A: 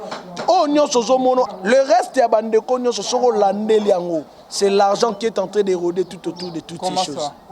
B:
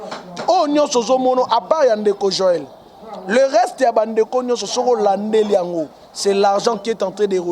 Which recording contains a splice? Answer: A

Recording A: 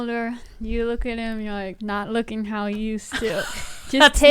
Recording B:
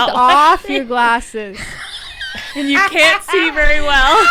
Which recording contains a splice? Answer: A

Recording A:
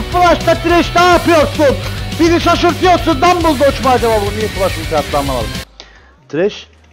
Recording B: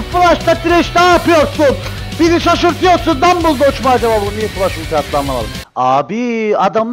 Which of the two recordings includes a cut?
B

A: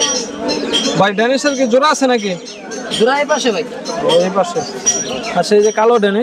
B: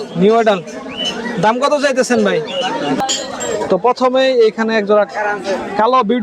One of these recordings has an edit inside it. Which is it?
B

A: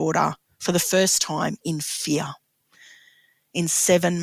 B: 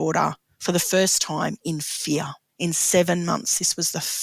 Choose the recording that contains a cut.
B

